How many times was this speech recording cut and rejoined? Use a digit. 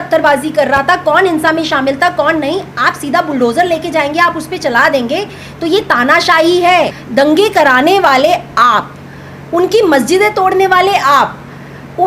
1